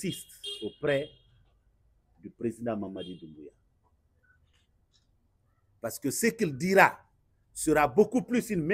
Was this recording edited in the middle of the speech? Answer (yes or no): no